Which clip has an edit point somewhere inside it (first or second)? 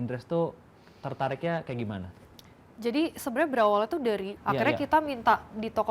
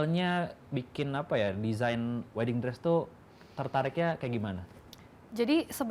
first